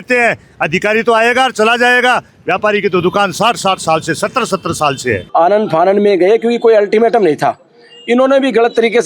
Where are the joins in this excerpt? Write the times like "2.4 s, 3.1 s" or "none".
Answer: 5.2 s